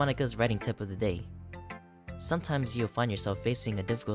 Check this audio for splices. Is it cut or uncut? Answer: uncut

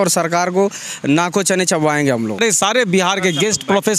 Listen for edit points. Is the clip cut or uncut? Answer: cut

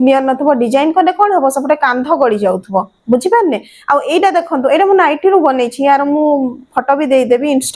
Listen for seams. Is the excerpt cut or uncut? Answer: uncut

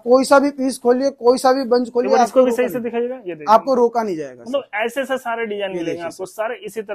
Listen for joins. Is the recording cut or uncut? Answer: uncut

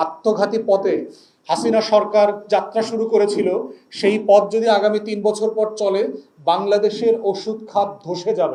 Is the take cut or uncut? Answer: uncut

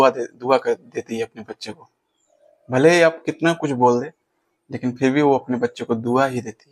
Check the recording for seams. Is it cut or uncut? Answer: uncut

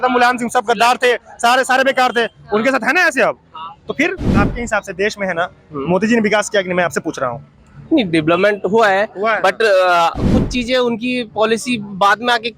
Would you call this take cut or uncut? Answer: cut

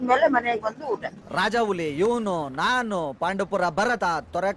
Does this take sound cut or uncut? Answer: cut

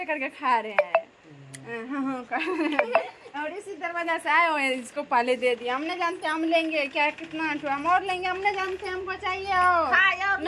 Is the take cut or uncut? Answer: uncut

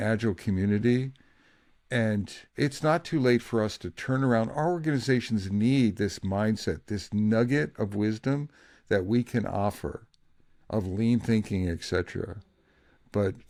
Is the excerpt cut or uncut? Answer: uncut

